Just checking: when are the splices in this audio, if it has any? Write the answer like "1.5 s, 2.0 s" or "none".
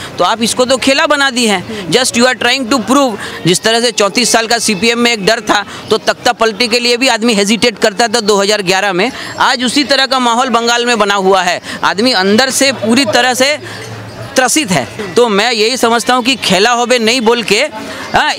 3.3 s, 15.0 s